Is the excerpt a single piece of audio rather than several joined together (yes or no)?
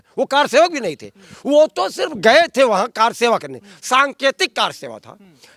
yes